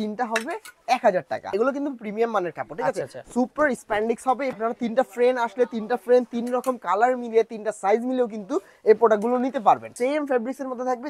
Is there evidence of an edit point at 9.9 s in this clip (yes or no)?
yes